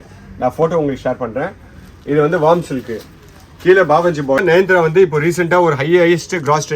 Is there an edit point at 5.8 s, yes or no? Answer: no